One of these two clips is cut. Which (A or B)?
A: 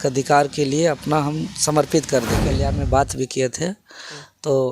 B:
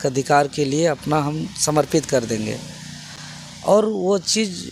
A